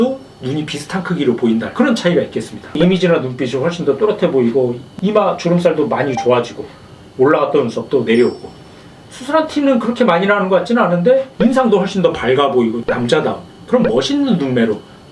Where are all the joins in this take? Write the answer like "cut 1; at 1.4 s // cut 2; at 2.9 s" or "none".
cut 1; at 2.5 s // cut 2; at 11.3 s